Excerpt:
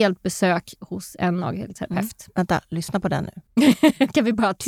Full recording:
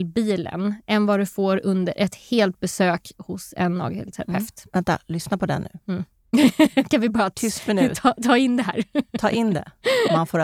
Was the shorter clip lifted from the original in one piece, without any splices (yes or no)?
no